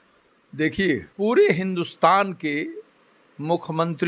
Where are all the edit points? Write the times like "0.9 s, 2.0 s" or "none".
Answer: 1.1 s